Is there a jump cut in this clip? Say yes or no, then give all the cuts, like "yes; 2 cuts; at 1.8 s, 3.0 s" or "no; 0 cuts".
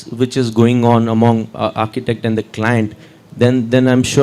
no; 0 cuts